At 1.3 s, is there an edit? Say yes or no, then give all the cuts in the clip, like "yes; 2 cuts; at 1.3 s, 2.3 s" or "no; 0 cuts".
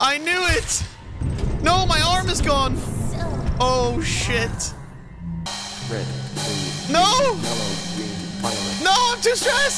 no; 1 cut; at 5.5 s